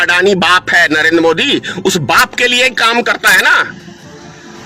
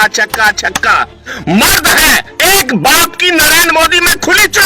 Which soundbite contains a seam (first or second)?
second